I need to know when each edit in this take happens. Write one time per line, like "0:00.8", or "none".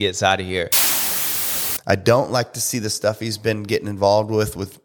0:01.3

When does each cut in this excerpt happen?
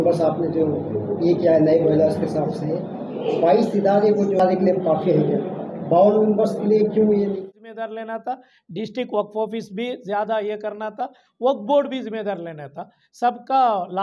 0:04.4
0:07.4

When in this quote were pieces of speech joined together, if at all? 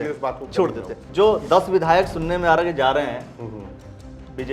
0:01.0

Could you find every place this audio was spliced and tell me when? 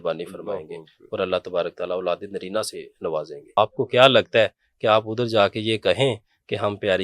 0:03.6

